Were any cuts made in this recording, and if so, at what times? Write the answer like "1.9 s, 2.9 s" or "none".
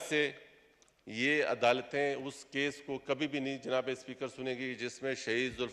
none

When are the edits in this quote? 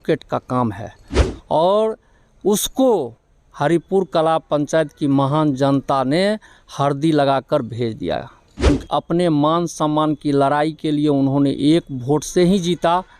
8.7 s

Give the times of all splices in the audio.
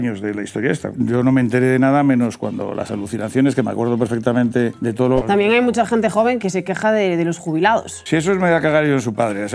0.9 s, 4.9 s, 6.4 s, 7.9 s

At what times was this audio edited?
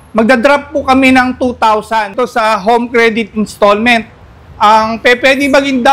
2.1 s

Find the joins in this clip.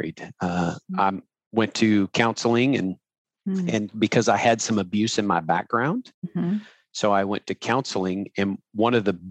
none

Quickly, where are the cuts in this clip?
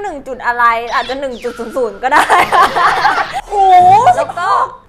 3.4 s

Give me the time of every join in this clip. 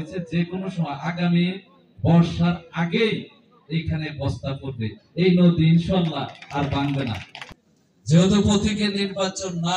7.3 s

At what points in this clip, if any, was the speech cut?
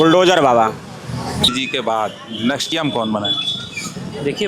1.5 s, 2.7 s

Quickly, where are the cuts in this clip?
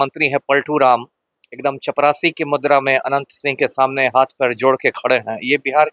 none

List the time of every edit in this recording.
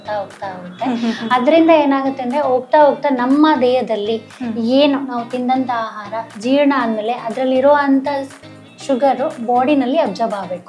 none

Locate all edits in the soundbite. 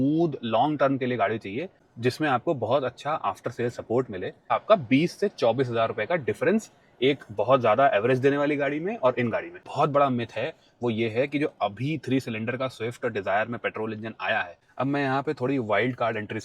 4.5 s, 9.6 s, 14.6 s

